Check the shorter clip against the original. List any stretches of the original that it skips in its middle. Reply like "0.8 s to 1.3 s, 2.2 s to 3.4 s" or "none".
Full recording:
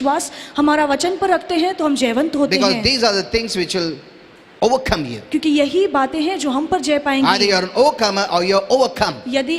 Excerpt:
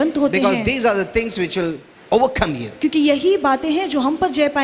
4.1 s to 4.4 s